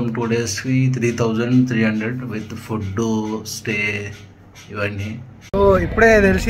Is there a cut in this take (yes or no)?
yes